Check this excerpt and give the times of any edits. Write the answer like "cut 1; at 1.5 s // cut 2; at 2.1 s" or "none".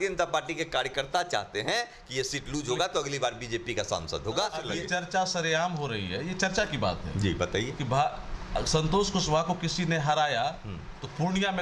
cut 1; at 4.7 s